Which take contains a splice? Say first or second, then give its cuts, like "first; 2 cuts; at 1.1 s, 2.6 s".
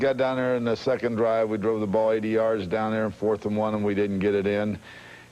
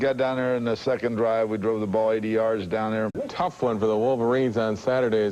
first; 1 cut; at 3.1 s